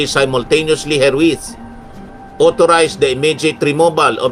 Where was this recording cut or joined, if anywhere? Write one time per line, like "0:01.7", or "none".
none